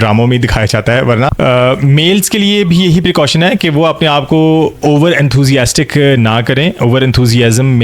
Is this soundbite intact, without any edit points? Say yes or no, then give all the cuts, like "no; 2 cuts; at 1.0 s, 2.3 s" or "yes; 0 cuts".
no; 1 cut; at 1.3 s